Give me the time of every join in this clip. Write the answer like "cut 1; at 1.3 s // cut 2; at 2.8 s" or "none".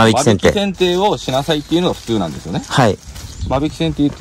none